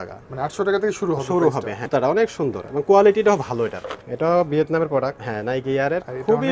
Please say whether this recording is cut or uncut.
cut